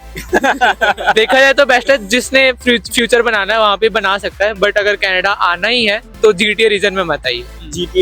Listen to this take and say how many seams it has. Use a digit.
0